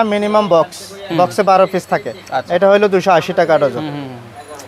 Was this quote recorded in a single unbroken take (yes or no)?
yes